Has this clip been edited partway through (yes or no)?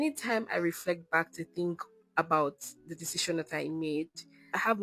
no